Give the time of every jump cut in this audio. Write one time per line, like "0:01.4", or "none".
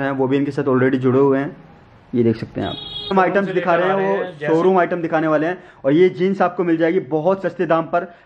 0:03.1